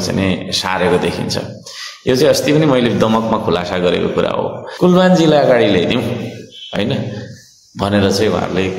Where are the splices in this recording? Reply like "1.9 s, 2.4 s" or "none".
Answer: 4.6 s